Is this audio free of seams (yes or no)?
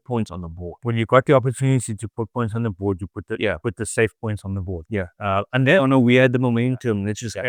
yes